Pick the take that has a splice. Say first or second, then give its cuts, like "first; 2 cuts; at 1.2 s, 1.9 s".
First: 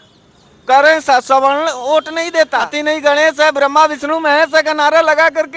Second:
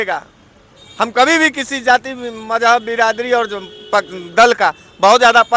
first; 1 cut; at 2.7 s